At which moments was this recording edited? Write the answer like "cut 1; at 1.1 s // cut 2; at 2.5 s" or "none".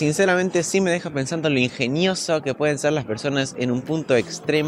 none